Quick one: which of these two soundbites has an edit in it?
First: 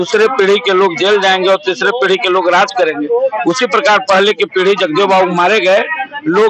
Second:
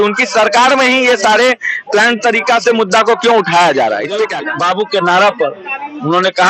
second; 1 cut; at 4.3 s

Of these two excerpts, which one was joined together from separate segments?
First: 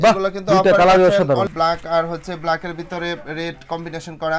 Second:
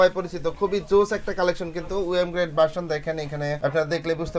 first; 1 cut; at 1.5 s

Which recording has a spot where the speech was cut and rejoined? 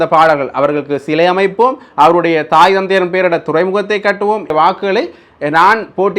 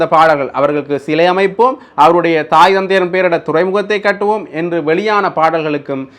first; 1 cut; at 4.5 s

